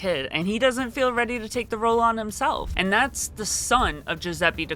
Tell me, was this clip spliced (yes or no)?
yes